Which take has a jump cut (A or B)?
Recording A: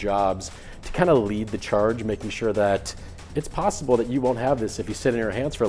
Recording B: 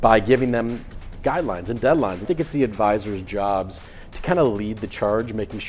B